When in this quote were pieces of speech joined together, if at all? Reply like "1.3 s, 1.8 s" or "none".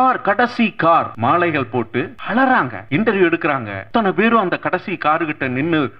1.1 s, 2.2 s, 2.8 s, 3.7 s